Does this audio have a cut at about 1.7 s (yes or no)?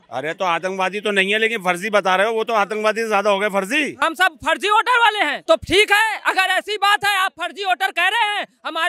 no